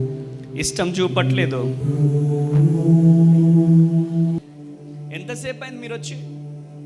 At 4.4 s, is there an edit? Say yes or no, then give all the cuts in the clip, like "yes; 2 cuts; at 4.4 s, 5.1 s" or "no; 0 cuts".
yes; 1 cut; at 4.4 s